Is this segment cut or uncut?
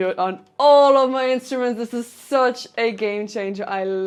uncut